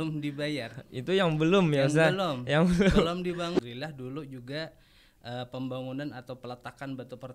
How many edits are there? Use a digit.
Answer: 1